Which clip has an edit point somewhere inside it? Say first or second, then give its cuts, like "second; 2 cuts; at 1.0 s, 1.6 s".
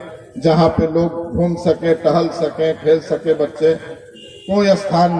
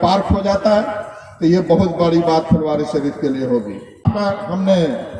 second; 1 cut; at 4.0 s